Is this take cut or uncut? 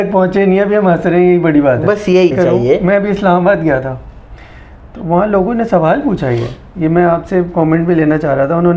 cut